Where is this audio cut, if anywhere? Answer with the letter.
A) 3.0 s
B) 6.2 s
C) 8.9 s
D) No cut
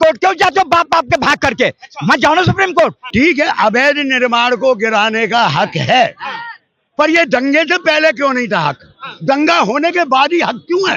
A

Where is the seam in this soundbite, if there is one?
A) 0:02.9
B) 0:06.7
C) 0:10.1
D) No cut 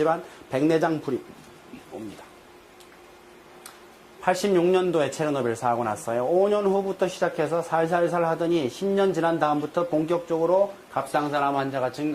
B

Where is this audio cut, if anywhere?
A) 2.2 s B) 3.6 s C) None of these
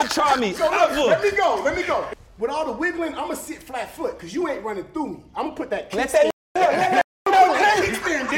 A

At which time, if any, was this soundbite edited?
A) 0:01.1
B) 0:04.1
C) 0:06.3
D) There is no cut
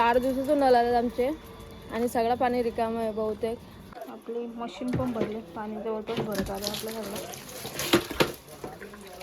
B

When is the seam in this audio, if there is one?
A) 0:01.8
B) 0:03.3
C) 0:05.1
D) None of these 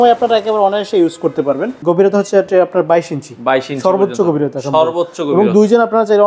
A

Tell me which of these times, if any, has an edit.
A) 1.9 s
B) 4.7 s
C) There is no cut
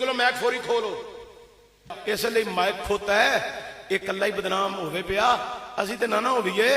A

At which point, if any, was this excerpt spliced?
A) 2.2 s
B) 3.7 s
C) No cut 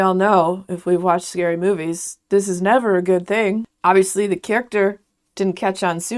B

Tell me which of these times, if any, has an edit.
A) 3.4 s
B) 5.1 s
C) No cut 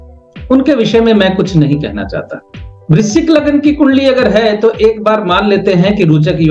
C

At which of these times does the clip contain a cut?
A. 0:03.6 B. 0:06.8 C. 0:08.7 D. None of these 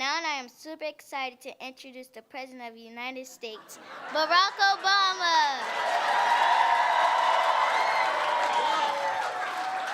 B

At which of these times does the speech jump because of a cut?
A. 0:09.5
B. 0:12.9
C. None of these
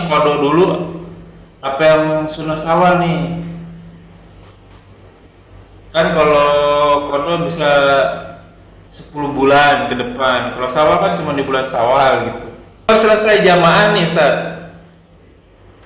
B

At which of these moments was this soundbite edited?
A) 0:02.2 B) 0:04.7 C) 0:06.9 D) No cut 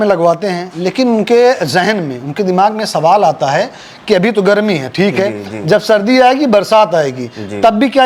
D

